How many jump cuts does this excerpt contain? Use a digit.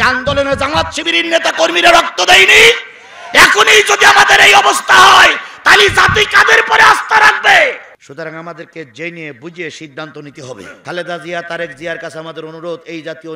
2